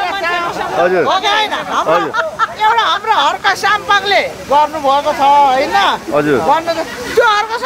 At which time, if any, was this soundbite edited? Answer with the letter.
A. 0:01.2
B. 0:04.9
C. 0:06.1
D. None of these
D